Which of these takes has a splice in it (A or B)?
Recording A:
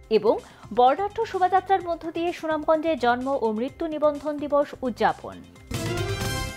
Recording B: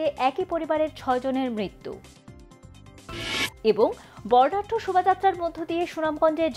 A